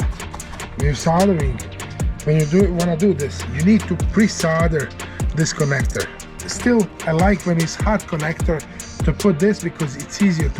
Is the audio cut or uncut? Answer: cut